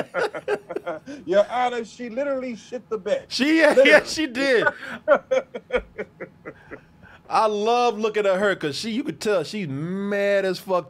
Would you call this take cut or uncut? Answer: uncut